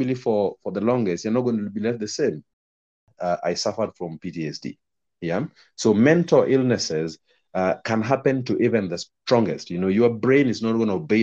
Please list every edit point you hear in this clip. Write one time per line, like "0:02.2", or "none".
0:03.0